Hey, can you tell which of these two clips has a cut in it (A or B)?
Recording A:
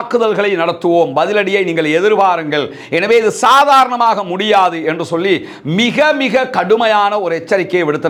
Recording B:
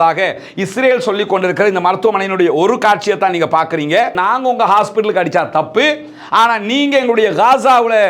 B